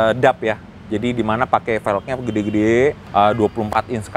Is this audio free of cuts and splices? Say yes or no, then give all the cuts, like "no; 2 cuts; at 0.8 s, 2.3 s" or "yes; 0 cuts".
no; 1 cut; at 3.0 s